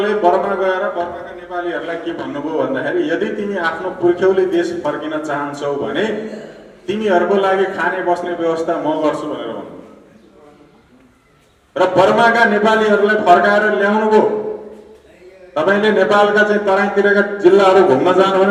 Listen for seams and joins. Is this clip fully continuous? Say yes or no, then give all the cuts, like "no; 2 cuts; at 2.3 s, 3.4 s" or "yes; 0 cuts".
yes; 0 cuts